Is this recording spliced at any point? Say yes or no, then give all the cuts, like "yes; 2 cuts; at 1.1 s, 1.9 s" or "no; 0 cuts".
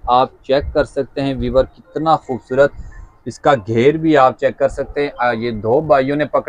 no; 0 cuts